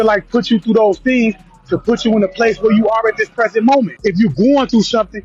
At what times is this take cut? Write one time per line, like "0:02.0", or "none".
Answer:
0:03.9